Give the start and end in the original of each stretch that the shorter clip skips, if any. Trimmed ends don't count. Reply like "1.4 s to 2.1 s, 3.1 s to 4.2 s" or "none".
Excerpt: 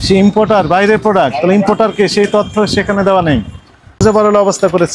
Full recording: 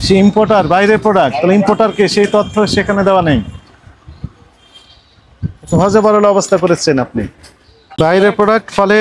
4.0 s to 5.9 s